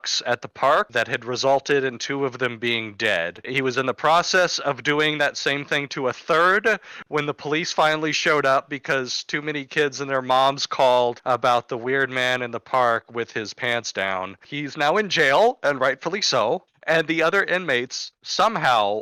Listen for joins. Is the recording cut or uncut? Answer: uncut